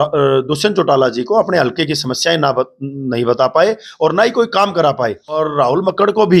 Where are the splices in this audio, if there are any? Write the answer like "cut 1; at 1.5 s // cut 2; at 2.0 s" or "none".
cut 1; at 5.4 s